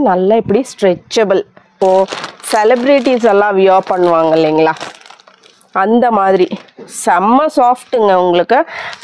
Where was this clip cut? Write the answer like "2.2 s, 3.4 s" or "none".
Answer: 1.7 s